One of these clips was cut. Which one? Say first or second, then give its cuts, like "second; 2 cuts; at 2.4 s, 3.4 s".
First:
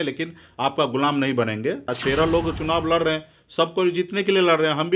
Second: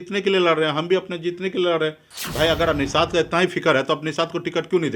first; 1 cut; at 2.0 s